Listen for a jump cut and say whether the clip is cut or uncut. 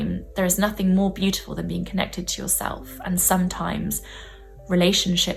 uncut